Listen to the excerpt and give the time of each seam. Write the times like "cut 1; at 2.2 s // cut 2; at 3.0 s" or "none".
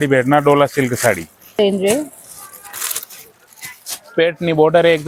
cut 1; at 1.6 s